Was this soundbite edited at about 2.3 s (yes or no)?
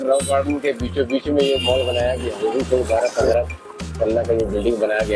yes